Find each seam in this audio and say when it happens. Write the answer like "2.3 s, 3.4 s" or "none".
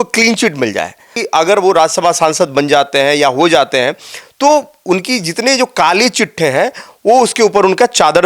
1.2 s